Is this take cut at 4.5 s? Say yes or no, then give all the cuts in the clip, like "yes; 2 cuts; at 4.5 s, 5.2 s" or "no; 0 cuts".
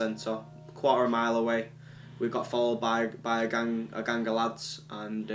no; 2 cuts; at 1.5 s, 3.2 s